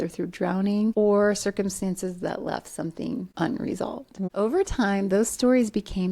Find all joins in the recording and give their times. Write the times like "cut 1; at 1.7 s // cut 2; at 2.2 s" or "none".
cut 1; at 0.9 s // cut 2; at 3.3 s // cut 3; at 4.3 s